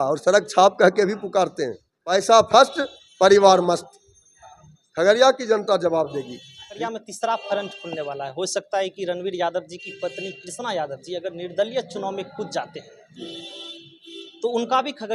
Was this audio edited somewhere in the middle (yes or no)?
yes